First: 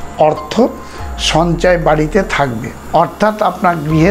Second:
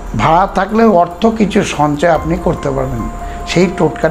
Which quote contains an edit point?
first; 1 cut; at 2.7 s

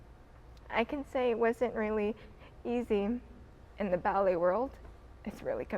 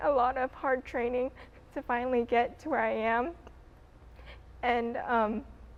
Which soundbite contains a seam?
first; 1 cut; at 3.6 s

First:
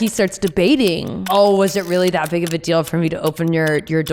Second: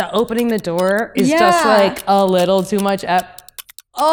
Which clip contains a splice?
first; 1 cut; at 1.3 s

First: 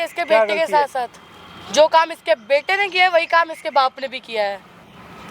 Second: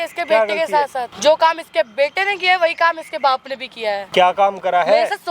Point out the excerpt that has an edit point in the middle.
second; 2 cuts; at 1.1 s, 4.0 s

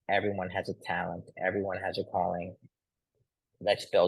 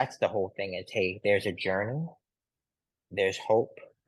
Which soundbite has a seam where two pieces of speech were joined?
first; 1 cut; at 3.1 s

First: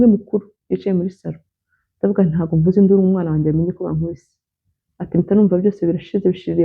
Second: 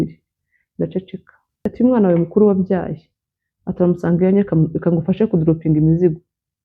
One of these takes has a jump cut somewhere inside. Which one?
second; 1 cut; at 1.6 s

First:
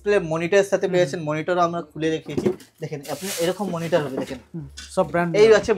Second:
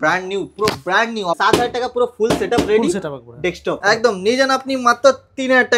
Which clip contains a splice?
second; 2 cuts; at 1.4 s, 3.8 s

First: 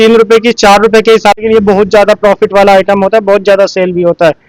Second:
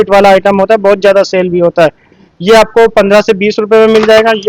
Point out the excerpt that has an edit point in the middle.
first; 1 cut; at 1.4 s

